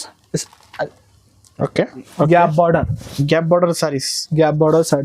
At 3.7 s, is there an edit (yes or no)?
no